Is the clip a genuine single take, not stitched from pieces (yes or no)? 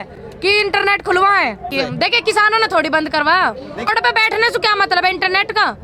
no